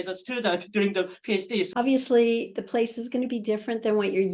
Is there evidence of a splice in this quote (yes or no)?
yes